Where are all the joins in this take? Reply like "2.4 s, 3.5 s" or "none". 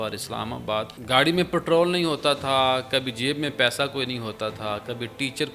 0.9 s